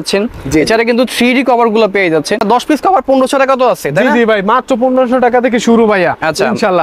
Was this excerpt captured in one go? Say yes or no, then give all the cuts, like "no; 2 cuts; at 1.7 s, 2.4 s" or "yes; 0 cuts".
no; 1 cut; at 2.4 s